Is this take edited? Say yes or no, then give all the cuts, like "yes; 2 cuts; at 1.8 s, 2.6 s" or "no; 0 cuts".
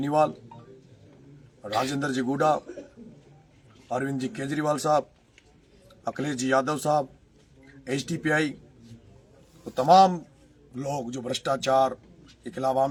no; 0 cuts